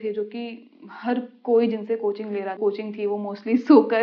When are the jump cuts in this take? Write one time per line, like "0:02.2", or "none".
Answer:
0:02.6